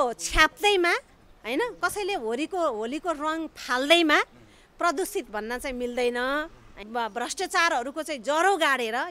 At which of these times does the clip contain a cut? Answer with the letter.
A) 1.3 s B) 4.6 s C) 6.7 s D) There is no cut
C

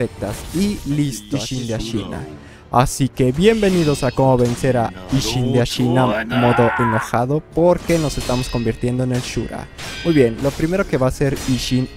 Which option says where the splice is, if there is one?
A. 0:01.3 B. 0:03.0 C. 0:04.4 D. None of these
A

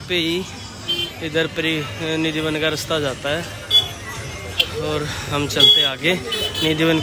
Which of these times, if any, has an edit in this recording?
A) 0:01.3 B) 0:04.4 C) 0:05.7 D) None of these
D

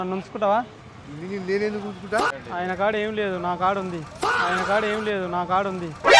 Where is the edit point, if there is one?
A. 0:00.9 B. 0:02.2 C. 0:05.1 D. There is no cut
B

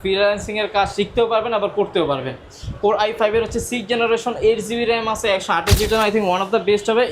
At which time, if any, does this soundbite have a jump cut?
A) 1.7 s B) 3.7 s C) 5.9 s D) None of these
C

